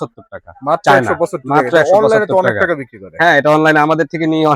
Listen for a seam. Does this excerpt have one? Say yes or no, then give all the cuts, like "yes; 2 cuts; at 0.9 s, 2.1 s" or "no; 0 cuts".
no; 0 cuts